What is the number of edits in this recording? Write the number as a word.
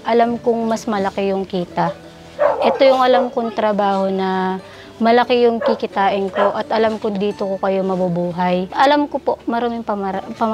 one